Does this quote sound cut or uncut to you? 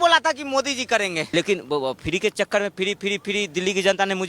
cut